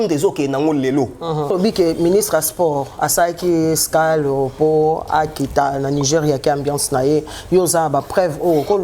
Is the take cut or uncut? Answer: cut